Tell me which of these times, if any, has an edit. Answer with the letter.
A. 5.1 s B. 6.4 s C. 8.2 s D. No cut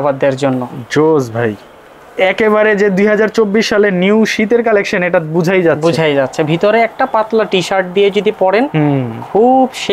D